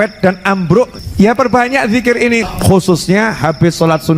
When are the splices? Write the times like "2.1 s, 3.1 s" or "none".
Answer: 0.9 s, 2.4 s